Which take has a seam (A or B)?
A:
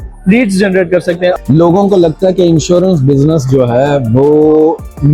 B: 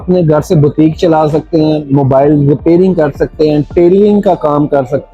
A